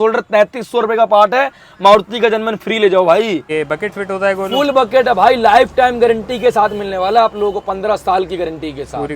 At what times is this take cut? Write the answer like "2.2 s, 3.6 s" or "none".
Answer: 3.5 s